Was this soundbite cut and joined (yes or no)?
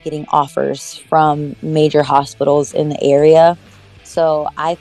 no